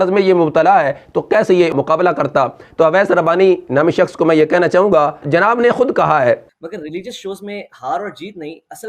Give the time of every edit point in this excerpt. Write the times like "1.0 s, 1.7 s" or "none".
2.6 s, 6.5 s